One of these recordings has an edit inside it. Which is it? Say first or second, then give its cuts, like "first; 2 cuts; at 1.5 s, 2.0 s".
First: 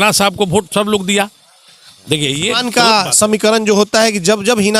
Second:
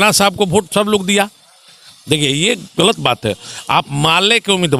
first; 1 cut; at 2.6 s